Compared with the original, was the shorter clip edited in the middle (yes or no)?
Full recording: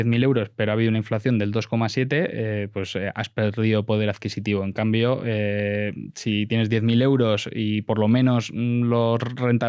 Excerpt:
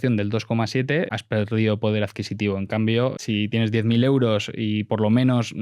yes